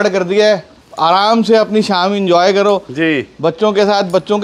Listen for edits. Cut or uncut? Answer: uncut